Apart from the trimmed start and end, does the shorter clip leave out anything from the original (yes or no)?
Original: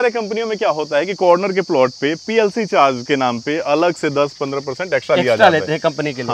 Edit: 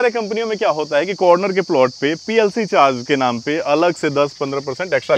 no